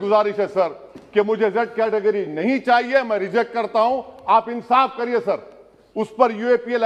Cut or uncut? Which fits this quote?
uncut